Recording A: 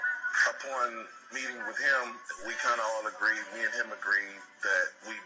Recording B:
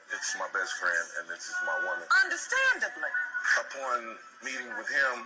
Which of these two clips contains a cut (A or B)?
A